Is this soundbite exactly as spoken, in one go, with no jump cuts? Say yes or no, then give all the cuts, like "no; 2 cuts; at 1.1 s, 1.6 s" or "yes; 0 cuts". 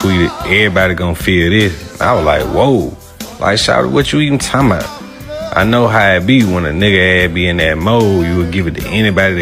yes; 0 cuts